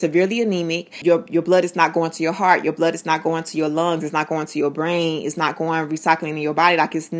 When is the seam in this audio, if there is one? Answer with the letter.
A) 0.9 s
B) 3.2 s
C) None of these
A